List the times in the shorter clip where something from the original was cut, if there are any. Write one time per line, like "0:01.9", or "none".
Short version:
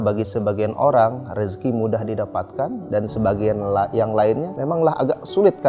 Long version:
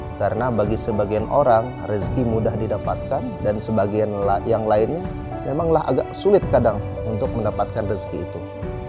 0:04.5